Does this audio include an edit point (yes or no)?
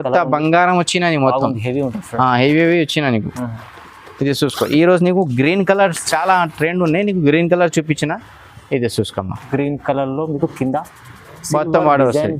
no